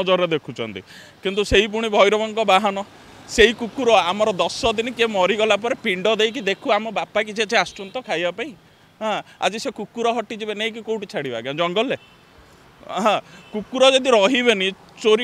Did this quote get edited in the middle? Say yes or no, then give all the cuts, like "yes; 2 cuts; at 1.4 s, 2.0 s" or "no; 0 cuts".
no; 0 cuts